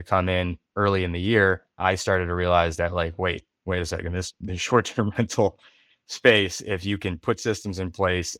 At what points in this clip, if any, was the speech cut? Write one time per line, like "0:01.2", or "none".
none